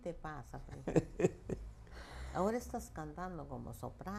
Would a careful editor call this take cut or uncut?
uncut